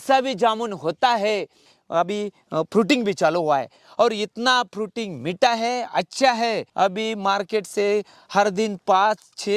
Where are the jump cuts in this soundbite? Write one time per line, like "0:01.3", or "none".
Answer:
0:01.7